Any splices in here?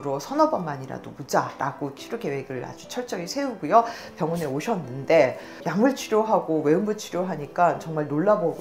yes; 1 cut; at 5.6 s

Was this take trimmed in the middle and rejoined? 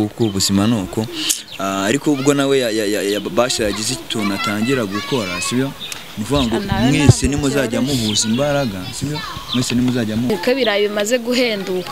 yes; 1 cut; at 10.3 s

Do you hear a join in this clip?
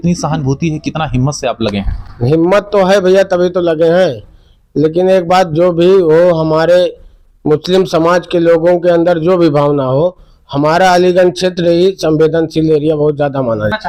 no; 0 cuts

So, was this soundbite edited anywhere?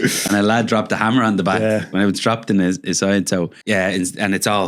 yes; 1 cut; at 3.6 s

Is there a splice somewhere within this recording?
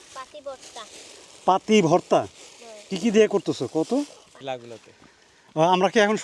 yes; 1 cut; at 4.4 s

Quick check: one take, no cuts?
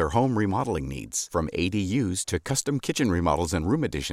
yes; 0 cuts

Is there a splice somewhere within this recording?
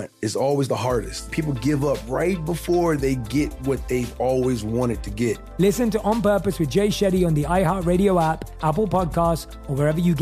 yes; 2 cuts; at 1.3 s, 5.4 s

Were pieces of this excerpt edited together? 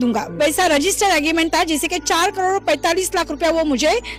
no; 0 cuts

